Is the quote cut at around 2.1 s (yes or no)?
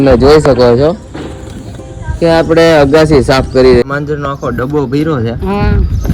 no